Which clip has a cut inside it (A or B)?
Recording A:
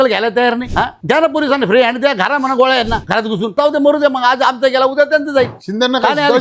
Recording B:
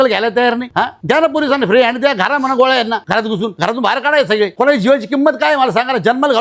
A